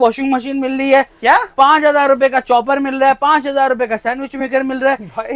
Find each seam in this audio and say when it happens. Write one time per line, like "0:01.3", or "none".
none